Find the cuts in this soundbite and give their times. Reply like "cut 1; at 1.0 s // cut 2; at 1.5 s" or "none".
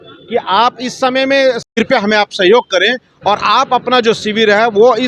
cut 1; at 1.7 s